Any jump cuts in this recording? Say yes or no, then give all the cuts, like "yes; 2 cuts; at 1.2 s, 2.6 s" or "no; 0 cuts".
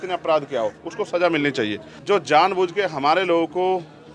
yes; 1 cut; at 1.9 s